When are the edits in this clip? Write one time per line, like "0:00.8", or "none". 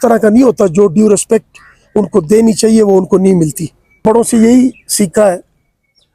0:04.0